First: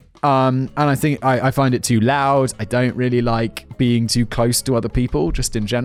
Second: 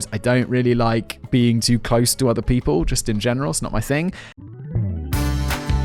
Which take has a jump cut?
second; 1 cut; at 4.3 s

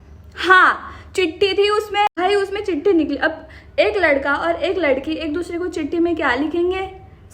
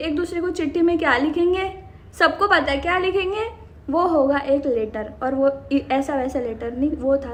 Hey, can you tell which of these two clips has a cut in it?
first; 1 cut; at 2.1 s

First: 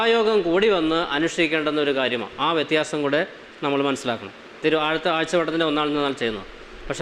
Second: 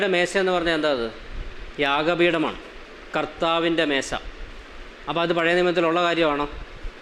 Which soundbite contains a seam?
first; 1 cut; at 4.6 s

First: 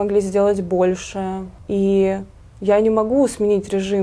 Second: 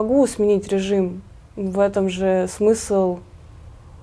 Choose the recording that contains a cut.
first; 1 cut; at 1.5 s

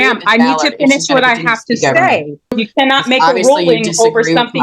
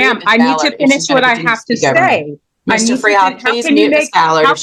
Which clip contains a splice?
first; 1 cut; at 2.6 s

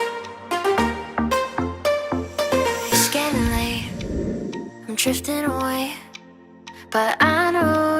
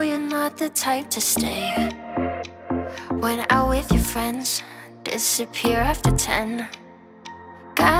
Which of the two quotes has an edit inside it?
first; 1 cut; at 1.8 s

